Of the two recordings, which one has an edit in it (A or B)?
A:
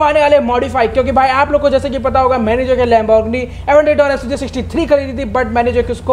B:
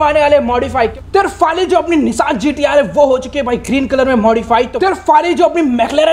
B